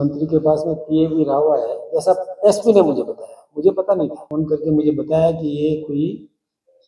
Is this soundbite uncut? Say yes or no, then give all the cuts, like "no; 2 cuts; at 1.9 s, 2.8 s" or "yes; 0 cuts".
no; 1 cut; at 4.2 s